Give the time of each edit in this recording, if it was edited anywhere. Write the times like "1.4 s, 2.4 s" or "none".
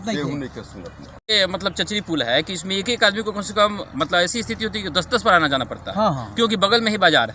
1.3 s